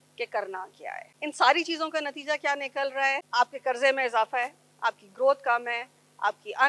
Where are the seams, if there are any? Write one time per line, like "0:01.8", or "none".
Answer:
0:01.1
0:03.3

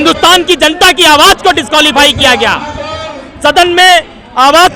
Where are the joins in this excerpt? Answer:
none

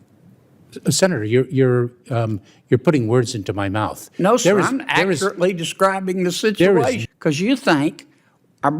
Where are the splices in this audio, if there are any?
0:07.1

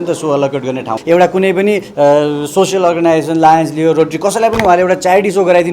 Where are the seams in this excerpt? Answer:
0:00.9

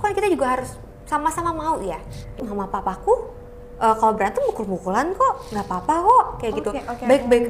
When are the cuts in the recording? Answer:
0:02.4

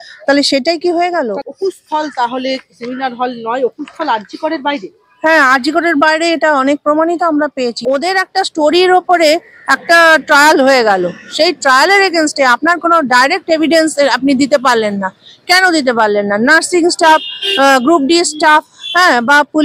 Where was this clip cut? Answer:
0:01.4
0:07.7

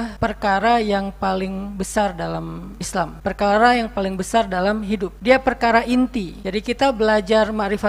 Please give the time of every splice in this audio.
none

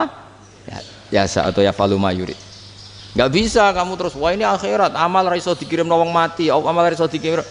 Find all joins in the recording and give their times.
none

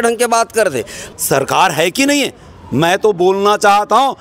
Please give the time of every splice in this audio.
0:01.0

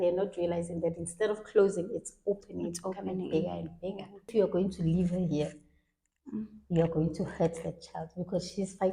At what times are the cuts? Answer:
0:04.3

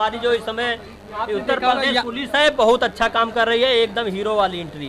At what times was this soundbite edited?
none

